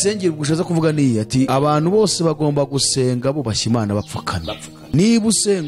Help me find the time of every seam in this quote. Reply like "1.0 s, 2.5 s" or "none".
1.5 s, 4.7 s